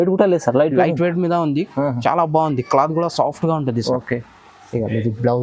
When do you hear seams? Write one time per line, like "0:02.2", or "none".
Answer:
none